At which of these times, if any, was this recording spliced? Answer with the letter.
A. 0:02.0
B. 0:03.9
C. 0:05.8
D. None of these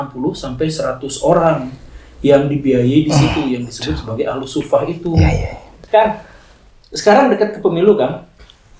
C